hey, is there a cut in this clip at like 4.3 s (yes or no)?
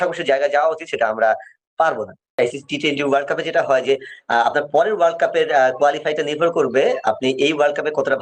no